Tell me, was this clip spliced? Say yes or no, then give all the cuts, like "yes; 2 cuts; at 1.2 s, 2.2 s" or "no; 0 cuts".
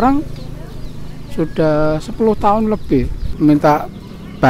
yes; 1 cut; at 3.3 s